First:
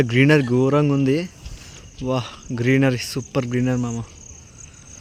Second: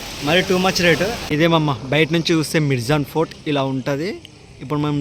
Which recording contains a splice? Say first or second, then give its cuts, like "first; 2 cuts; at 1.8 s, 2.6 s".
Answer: second; 1 cut; at 1.2 s